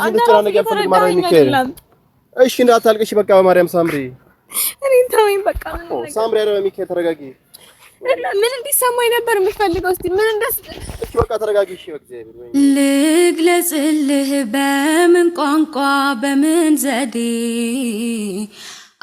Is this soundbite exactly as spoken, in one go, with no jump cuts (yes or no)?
no